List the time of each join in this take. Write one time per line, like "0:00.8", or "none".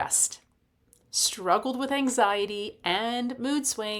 none